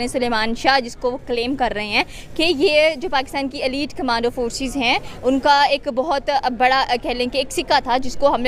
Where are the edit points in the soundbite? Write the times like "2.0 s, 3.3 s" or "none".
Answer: none